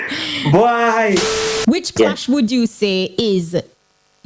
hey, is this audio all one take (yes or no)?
no